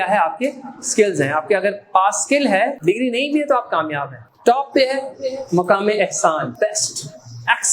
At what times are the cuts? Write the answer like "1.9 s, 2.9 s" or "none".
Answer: 2.8 s, 4.2 s, 6.5 s